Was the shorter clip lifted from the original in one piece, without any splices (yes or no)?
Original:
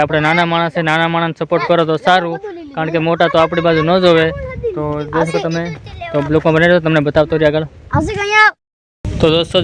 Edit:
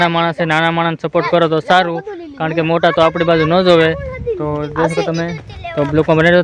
yes